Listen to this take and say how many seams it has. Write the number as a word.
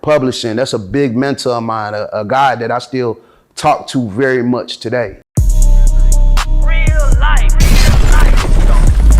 one